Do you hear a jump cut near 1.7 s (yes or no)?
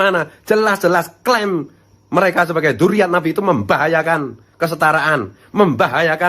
no